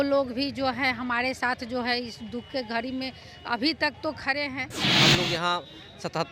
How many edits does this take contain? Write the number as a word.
one